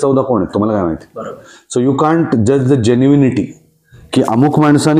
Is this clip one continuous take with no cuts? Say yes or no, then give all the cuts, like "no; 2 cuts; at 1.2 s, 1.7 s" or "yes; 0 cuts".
yes; 0 cuts